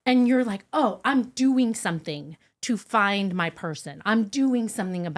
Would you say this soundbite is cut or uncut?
uncut